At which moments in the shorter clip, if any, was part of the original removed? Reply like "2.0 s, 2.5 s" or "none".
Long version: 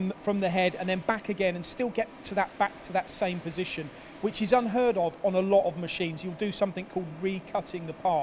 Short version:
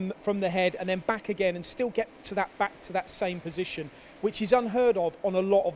none